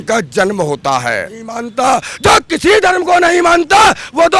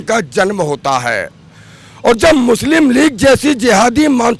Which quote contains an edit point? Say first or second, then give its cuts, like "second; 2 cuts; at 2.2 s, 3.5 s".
first; 1 cut; at 1.6 s